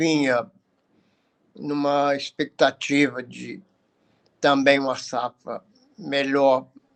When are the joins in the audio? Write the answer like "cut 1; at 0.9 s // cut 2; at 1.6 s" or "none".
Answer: none